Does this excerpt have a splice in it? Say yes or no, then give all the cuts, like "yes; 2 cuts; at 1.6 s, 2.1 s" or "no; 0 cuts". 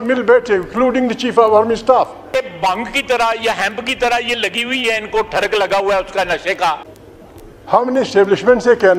yes; 2 cuts; at 2.3 s, 6.9 s